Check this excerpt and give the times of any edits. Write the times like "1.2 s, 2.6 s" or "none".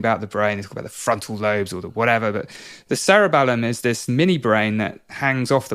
3.9 s